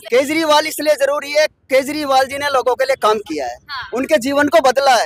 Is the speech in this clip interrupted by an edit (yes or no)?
no